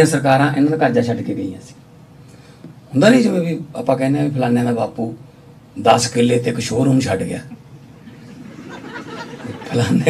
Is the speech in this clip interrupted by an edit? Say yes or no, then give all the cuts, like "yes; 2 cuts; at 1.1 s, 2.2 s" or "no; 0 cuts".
no; 0 cuts